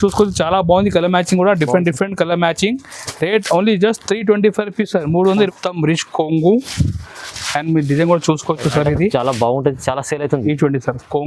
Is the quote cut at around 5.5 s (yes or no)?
yes